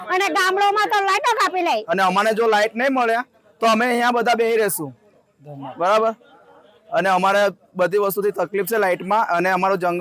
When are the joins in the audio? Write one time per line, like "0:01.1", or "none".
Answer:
0:01.8